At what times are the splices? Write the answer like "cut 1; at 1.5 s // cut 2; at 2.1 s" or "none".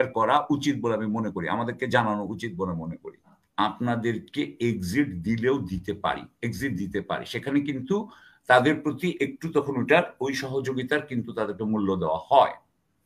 cut 1; at 3.4 s